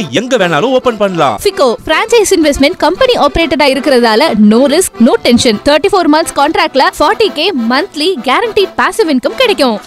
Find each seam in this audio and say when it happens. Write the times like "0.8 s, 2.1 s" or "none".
none